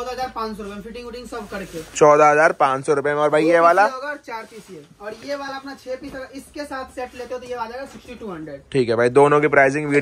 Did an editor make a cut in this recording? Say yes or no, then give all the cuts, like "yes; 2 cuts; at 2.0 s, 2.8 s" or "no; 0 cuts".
no; 0 cuts